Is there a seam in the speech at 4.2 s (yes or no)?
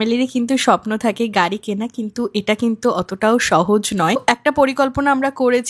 yes